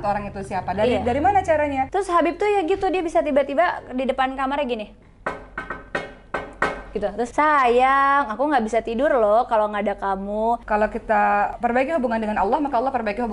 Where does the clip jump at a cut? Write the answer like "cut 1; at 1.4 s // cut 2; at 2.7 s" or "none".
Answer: cut 1; at 1.9 s // cut 2; at 7.3 s // cut 3; at 10.6 s